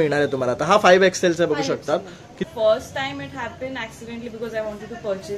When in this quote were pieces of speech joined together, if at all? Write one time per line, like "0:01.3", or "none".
0:02.3